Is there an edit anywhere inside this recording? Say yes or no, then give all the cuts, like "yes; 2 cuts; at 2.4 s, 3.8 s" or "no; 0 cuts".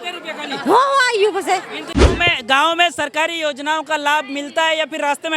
yes; 1 cut; at 1.9 s